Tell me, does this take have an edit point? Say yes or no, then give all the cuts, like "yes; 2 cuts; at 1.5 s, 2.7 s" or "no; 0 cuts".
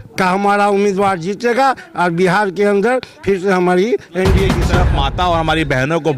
yes; 1 cut; at 4.7 s